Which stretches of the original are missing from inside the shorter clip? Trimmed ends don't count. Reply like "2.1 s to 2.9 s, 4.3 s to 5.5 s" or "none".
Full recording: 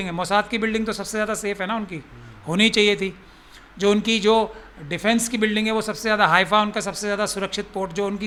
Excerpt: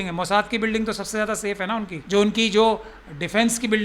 1.9 s to 3.7 s